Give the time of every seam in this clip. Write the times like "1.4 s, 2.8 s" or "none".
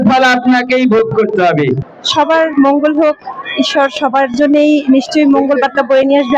1.8 s